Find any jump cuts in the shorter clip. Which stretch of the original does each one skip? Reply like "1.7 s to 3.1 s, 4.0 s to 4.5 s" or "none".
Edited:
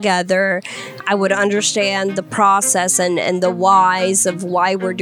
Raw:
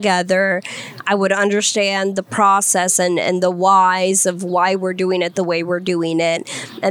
none